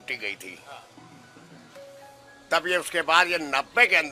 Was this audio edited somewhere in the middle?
no; 0 cuts

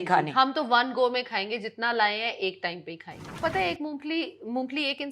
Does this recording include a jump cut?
yes; 1 cut; at 3.4 s

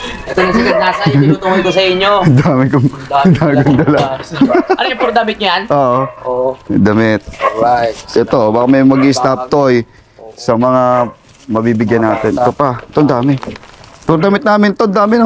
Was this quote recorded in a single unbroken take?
yes; 0 cuts

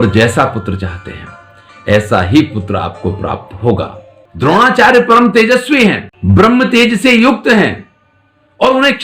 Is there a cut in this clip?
yes; 1 cut; at 4.2 s

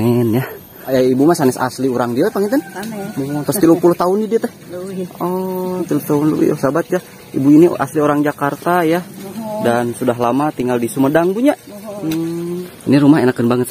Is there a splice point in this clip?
yes; 2 cuts; at 0.9 s, 12.7 s

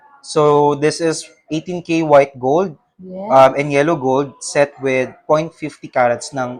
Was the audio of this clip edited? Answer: no; 0 cuts

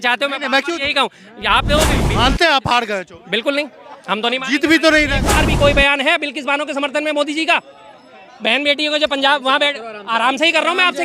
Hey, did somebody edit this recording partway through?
yes; 2 cuts; at 1.9 s, 5.3 s

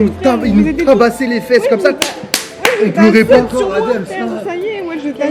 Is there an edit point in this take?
no; 0 cuts

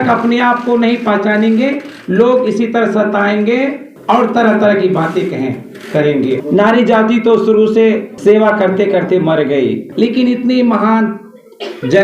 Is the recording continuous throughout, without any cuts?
no; 4 cuts; at 3.9 s, 6.4 s, 8.1 s, 9.9 s

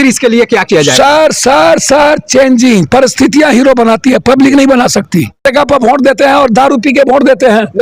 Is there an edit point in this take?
yes; 1 cut; at 5.4 s

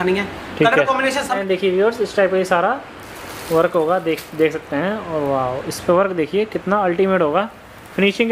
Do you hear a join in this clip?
yes; 1 cut; at 1.3 s

